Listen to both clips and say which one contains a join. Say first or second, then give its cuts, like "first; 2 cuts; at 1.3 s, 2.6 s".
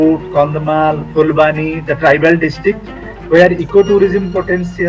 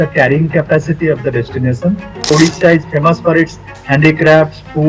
second; 1 cut; at 2.3 s